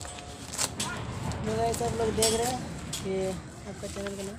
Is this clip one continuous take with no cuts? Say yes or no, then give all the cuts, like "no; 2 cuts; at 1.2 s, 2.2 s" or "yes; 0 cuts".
yes; 0 cuts